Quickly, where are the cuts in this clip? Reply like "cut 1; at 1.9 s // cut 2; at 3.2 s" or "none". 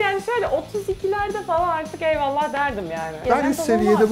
cut 1; at 3.2 s